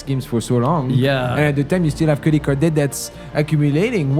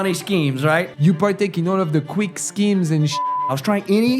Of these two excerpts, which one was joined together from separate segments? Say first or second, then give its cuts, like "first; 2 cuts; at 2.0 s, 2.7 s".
second; 2 cuts; at 0.9 s, 3.4 s